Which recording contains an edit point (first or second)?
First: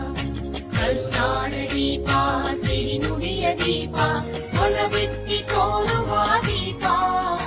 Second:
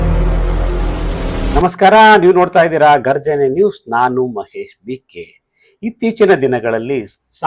second